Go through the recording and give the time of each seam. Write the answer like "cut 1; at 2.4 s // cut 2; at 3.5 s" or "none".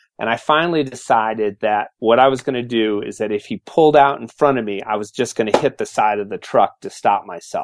none